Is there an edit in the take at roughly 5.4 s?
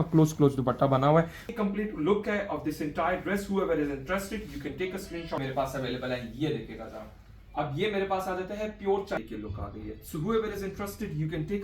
yes; 3 cuts; at 1.5 s, 5.4 s, 9.2 s

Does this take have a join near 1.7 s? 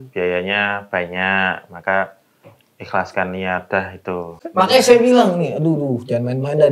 no; 1 cut; at 4.4 s

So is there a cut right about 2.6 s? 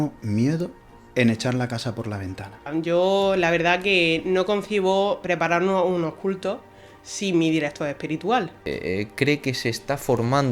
yes; 2 cuts; at 2.6 s, 8.6 s

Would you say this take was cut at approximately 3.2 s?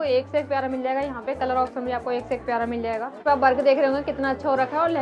yes; 1 cut; at 3.2 s

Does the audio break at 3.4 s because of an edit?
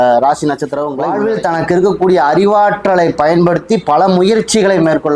no; 1 cut; at 1.2 s

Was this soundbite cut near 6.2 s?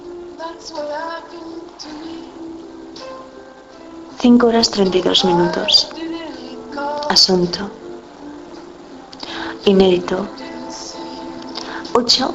yes; 1 cut; at 6.2 s

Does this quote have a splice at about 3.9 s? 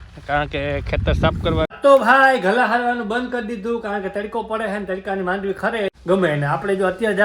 no; 2 cuts; at 1.7 s, 5.9 s

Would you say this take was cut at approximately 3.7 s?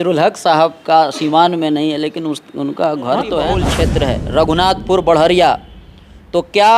yes; 1 cut; at 3.7 s

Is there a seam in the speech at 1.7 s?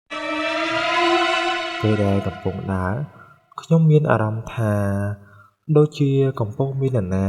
yes; 1 cut; at 1.7 s

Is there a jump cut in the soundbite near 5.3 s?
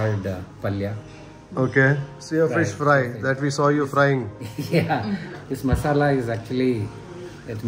yes; 2 cuts; at 2.1 s, 5.3 s

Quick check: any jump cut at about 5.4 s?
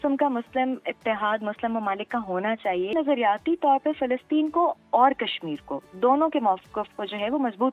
no; 1 cut; at 2.9 s

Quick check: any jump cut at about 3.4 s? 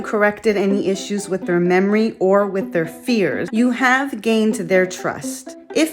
yes; 1 cut; at 3.4 s

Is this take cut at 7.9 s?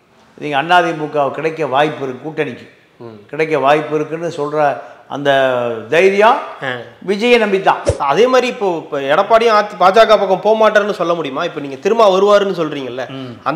yes; 1 cut; at 7.9 s

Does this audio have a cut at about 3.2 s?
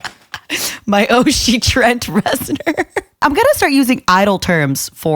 yes; 1 cut; at 3.2 s

